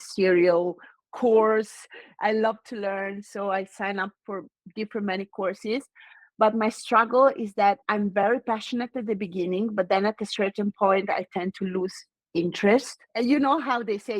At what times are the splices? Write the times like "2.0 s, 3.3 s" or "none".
13.1 s